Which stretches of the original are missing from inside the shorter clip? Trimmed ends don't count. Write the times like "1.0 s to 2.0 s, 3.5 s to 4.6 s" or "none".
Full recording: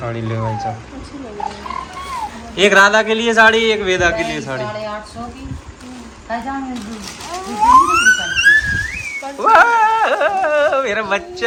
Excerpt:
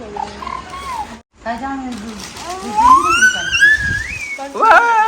2.4 s to 6.0 s